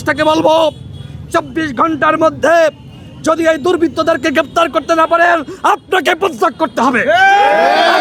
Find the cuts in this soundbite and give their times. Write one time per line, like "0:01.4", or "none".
none